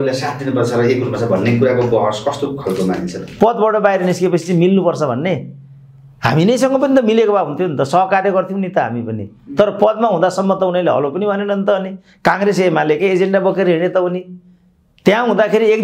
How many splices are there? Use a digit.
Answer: 1